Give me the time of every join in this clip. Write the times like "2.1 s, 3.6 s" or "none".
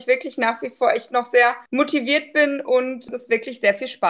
1.6 s, 3.0 s